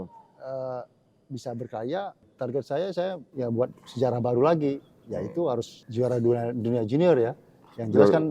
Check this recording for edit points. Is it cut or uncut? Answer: cut